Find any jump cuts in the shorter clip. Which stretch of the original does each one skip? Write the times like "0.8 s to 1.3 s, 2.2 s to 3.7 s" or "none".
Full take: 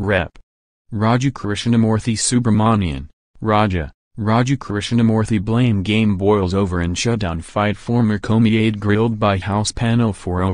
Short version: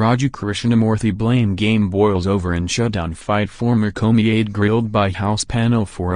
1.9 s to 5.2 s